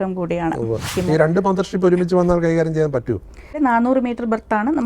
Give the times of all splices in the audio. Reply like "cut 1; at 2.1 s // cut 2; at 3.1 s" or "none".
cut 1; at 0.9 s // cut 2; at 3.5 s